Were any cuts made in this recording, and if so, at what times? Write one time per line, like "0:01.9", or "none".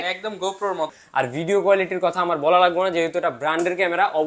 0:00.9